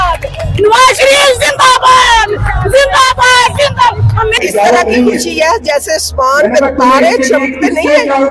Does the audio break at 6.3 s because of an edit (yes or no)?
no